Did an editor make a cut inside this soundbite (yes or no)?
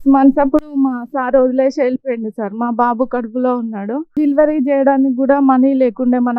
no